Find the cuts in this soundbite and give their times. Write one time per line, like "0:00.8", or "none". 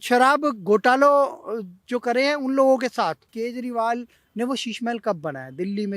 0:03.3